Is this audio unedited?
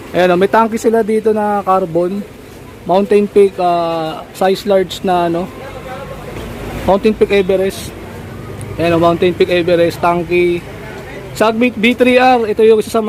yes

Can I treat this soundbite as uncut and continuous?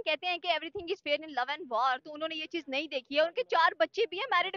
yes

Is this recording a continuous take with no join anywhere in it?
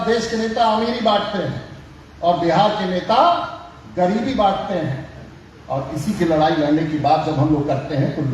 yes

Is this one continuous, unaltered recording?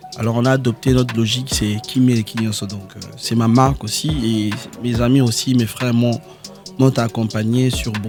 yes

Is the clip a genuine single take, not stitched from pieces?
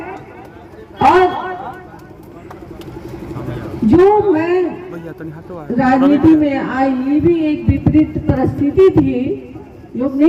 yes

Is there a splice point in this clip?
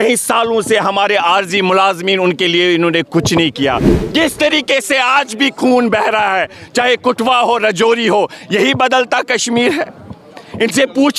no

